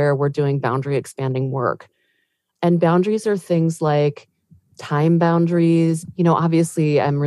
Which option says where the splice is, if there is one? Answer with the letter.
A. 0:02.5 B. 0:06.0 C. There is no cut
B